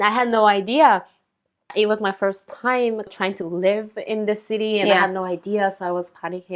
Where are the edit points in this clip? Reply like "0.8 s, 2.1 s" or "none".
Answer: 1.7 s, 3.1 s